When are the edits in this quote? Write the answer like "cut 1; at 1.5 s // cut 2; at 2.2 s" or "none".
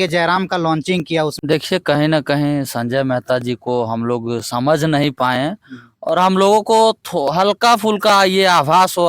cut 1; at 1.3 s